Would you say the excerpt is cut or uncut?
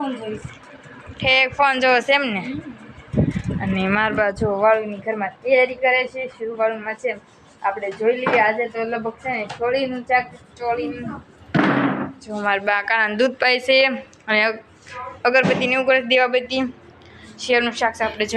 uncut